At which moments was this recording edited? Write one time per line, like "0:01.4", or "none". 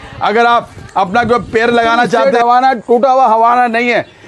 0:02.2

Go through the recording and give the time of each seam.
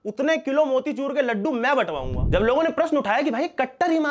0:02.1

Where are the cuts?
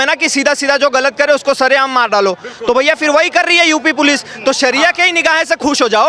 none

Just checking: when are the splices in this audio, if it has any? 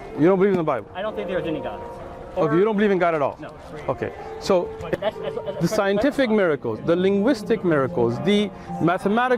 0:05.0

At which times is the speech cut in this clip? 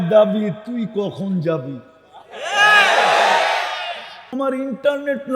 0:04.3

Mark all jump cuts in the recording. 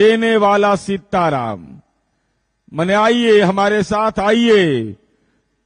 none

